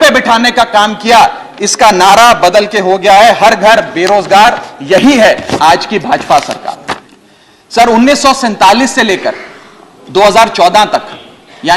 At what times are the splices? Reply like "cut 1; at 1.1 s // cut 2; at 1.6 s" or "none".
cut 1; at 6.9 s